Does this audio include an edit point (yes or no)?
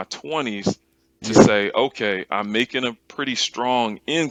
no